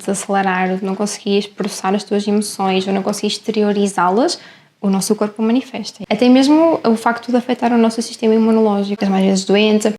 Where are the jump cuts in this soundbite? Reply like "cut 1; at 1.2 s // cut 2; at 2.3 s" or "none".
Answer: cut 1; at 6.0 s // cut 2; at 9.0 s